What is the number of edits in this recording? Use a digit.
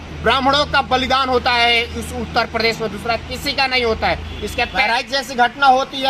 1